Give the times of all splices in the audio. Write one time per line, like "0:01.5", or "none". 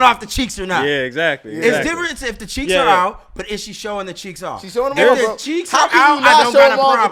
none